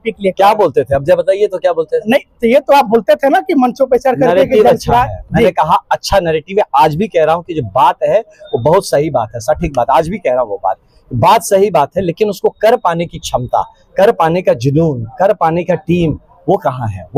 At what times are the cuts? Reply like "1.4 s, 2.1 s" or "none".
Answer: none